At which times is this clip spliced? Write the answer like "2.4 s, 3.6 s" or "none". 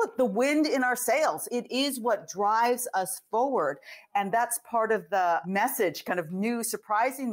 1.4 s, 5.4 s